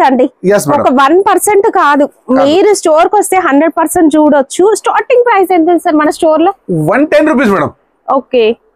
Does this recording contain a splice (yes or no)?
no